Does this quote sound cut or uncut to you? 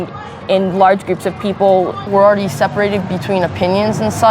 cut